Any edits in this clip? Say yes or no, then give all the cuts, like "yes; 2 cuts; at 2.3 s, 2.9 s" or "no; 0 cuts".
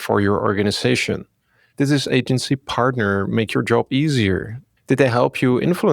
yes; 1 cut; at 1.6 s